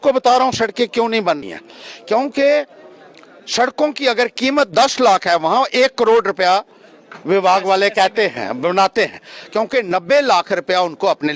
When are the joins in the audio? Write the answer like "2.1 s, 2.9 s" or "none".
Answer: 1.4 s